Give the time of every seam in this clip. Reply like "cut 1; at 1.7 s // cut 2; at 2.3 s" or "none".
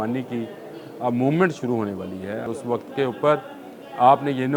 cut 1; at 2.4 s

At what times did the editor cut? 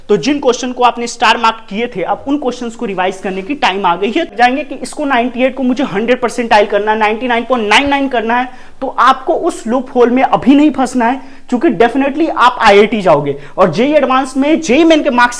cut 1; at 4.3 s

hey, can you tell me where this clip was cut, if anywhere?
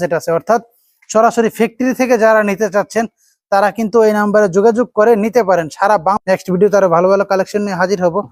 none

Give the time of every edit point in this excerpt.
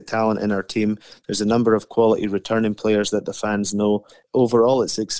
cut 1; at 4.2 s

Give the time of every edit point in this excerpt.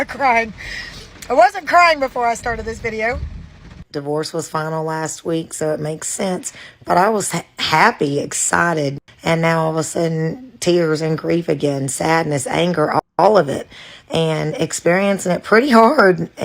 cut 1; at 3.8 s

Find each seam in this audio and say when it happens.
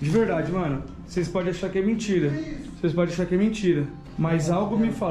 cut 1; at 2.6 s

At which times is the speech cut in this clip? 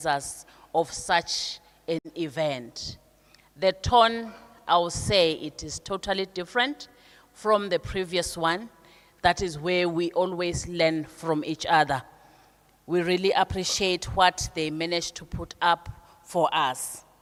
none

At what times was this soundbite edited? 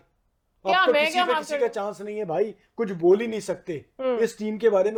none

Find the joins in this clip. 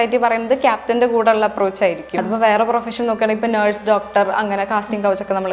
cut 1; at 2.1 s

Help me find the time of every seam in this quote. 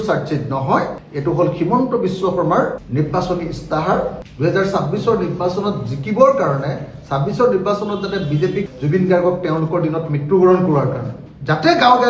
cut 1; at 4.2 s // cut 2; at 8.7 s

